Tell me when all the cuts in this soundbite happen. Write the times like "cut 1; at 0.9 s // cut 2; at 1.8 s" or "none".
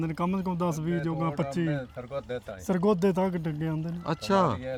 none

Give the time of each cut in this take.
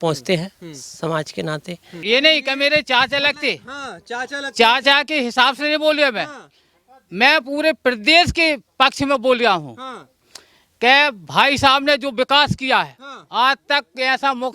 cut 1; at 1.9 s

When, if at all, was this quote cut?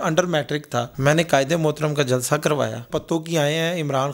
cut 1; at 0.9 s // cut 2; at 2.9 s

